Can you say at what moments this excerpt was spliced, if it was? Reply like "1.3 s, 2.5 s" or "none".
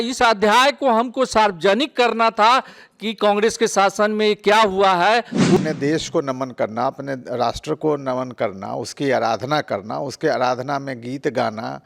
5.6 s